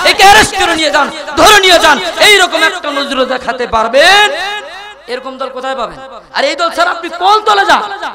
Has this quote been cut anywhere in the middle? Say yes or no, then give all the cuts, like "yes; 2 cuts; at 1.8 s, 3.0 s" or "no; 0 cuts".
no; 0 cuts